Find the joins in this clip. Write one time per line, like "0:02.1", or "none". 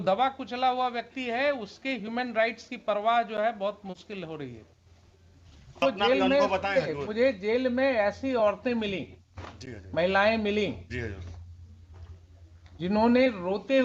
0:05.8